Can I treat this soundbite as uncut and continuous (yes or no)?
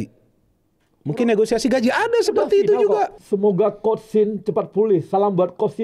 no